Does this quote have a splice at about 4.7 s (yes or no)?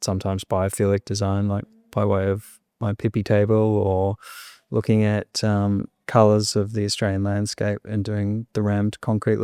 no